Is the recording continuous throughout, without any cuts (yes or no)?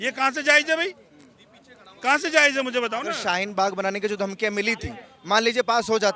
yes